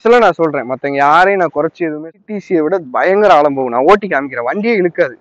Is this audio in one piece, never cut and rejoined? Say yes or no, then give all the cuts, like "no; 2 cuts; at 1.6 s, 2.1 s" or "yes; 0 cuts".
no; 1 cut; at 2.2 s